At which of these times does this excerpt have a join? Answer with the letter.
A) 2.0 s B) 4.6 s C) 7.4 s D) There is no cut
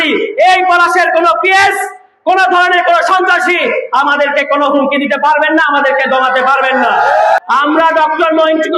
C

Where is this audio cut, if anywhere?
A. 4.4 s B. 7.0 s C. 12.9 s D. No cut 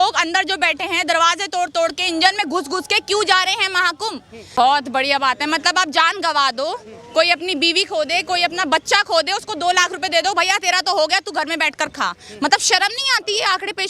A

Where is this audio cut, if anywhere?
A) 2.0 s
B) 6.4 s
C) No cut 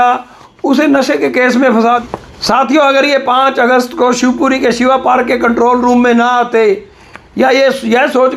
A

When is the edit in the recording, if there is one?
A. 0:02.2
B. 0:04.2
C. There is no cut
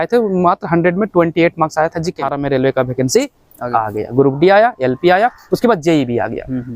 A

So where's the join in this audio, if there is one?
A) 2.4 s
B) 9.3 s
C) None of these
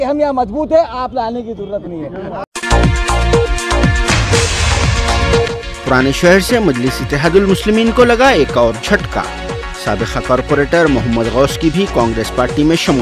A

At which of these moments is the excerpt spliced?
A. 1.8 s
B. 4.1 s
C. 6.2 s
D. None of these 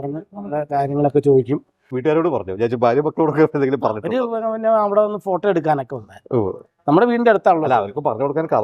A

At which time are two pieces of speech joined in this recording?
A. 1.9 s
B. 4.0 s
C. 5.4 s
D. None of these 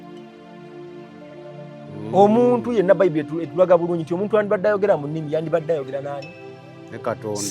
A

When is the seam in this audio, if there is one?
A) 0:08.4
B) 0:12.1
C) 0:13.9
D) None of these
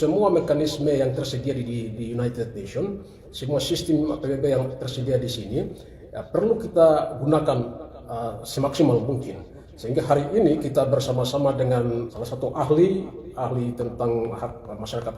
B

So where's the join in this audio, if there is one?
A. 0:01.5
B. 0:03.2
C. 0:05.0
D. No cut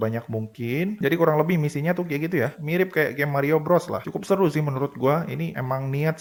D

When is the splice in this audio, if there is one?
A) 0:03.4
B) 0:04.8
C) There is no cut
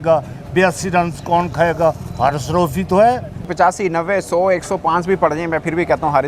A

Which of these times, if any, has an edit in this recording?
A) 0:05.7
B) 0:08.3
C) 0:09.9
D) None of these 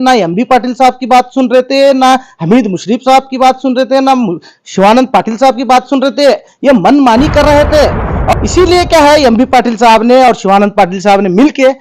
B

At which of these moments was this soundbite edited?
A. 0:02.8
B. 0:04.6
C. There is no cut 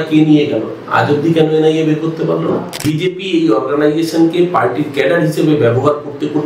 A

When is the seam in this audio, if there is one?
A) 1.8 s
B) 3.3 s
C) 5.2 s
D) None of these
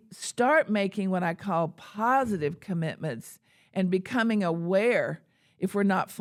D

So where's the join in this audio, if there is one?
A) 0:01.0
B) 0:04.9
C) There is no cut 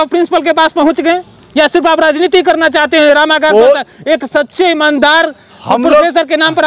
C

